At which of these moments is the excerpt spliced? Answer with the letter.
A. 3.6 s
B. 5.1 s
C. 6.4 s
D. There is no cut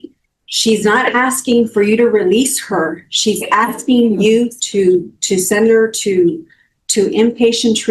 D